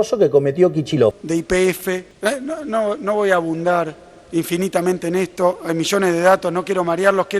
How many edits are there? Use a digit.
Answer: 2